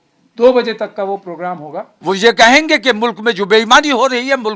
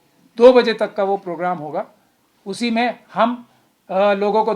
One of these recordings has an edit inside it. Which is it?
first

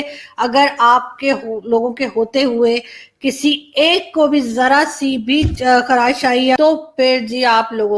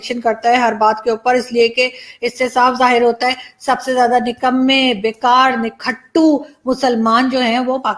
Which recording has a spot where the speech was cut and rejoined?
first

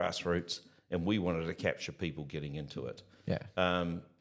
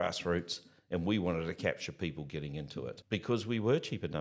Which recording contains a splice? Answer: second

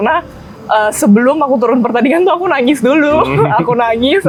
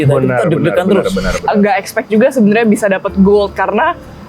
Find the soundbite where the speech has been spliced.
second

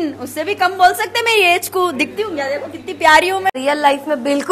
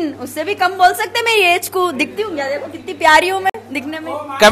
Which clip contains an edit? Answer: first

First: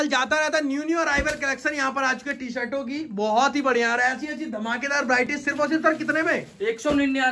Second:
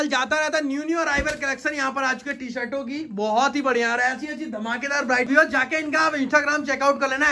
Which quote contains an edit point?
second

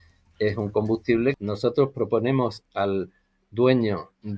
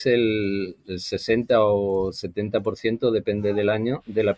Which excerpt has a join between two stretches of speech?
first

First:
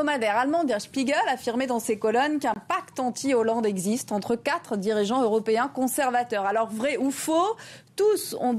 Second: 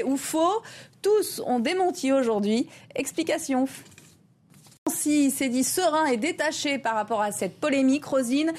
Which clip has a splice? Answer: second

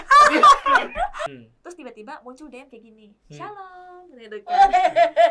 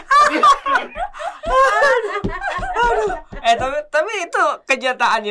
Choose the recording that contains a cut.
first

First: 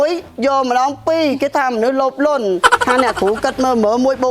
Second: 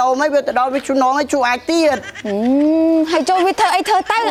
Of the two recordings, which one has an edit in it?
first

